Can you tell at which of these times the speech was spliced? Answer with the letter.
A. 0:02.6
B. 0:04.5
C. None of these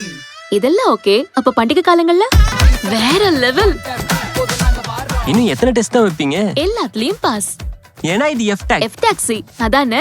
A